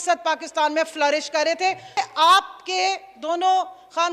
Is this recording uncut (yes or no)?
no